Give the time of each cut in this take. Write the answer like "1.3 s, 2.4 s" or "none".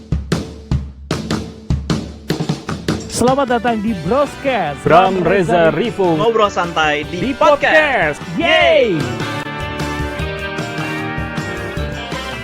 none